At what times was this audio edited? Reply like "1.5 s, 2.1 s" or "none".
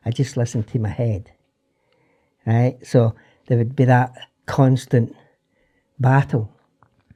none